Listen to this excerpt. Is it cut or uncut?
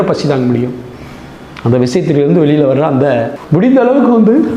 cut